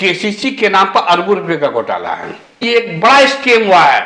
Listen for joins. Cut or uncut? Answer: cut